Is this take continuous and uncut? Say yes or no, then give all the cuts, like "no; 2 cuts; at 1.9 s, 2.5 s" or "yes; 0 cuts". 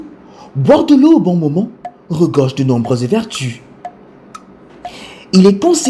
yes; 0 cuts